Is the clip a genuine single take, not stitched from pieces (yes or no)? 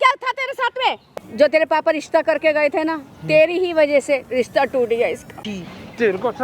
no